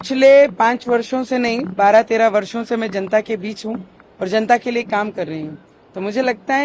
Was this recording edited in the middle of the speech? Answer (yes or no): no